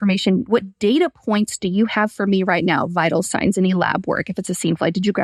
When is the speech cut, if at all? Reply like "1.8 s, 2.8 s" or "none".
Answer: none